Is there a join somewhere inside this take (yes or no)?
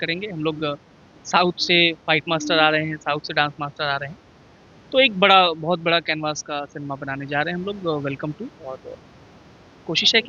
no